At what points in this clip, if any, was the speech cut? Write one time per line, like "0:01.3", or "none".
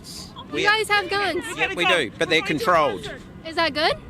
none